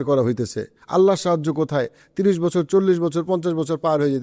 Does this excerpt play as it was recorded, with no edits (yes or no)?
yes